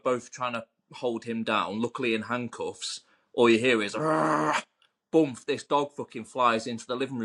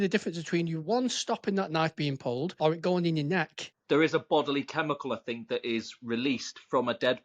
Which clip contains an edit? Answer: second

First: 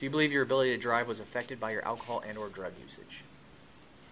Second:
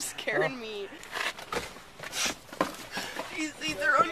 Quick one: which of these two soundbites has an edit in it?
second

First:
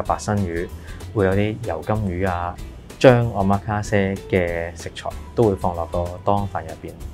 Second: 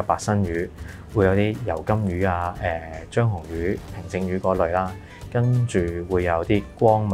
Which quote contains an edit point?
first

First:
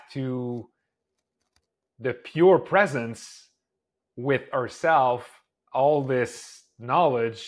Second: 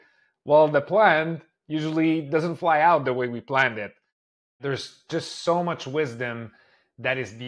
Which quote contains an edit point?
second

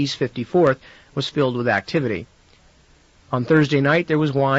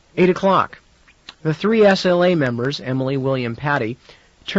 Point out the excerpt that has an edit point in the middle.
second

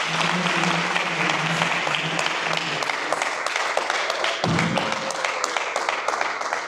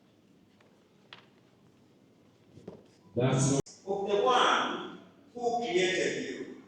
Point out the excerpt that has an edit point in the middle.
second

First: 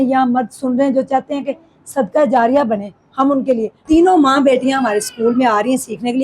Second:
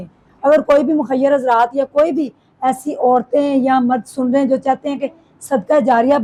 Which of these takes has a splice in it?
first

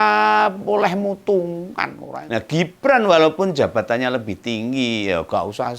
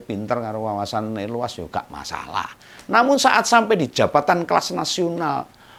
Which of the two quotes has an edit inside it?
first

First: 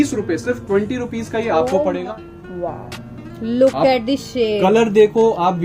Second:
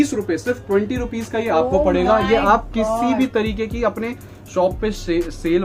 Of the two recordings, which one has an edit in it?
first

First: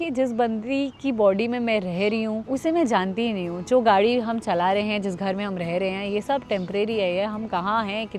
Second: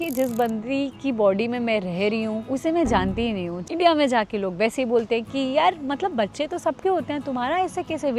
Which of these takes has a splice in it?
second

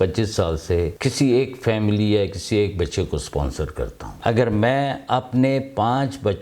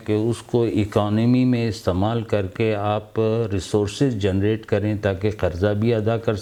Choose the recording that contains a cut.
first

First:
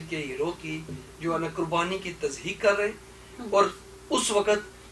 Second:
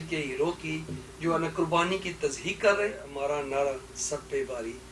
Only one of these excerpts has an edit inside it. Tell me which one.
second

